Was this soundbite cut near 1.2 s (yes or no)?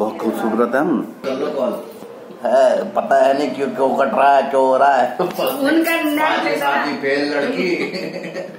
yes